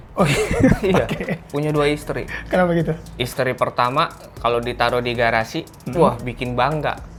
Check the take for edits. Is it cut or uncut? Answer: uncut